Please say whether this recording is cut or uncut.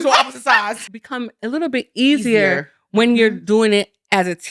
cut